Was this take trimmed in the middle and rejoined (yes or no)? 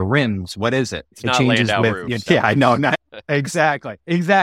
yes